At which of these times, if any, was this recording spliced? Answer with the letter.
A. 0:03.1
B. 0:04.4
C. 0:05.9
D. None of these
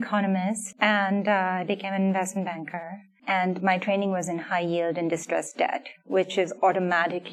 D